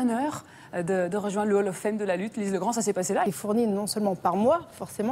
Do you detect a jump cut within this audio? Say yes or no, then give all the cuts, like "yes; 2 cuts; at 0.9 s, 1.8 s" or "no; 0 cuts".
no; 0 cuts